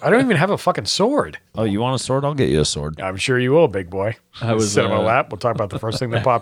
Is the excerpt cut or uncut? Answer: cut